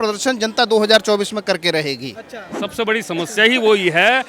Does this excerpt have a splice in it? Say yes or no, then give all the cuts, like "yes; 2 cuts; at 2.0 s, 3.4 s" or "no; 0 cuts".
yes; 1 cut; at 2.4 s